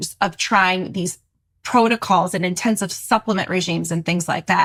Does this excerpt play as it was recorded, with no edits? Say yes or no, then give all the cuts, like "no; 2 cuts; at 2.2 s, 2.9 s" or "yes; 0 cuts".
yes; 0 cuts